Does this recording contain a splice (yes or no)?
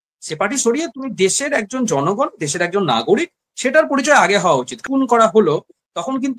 yes